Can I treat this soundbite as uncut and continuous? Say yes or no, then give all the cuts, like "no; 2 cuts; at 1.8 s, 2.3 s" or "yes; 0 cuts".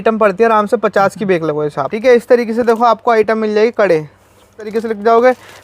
no; 2 cuts; at 1.9 s, 4.7 s